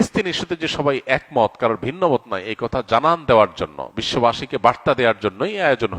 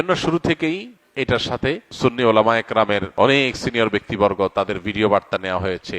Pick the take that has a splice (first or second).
second